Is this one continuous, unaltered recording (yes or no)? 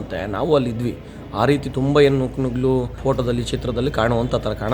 no